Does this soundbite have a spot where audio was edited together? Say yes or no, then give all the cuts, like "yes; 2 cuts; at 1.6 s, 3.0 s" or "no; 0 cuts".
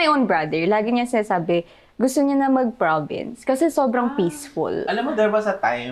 no; 0 cuts